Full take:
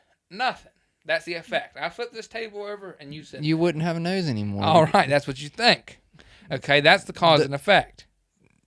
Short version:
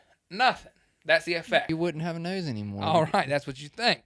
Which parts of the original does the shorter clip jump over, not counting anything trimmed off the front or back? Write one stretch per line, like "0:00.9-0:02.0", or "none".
0:01.7-0:03.5